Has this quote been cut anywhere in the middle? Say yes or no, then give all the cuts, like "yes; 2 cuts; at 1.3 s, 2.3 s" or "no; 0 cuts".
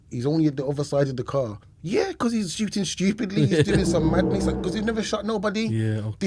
yes; 1 cut; at 1.6 s